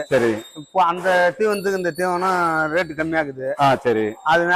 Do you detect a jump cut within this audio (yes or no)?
no